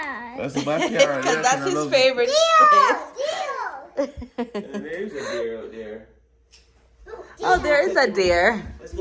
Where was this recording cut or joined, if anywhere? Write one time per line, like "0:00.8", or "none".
none